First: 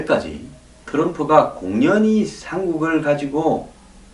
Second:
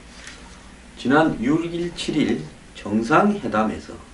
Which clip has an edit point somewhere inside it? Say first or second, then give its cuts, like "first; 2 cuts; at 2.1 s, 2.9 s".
first; 1 cut; at 2.4 s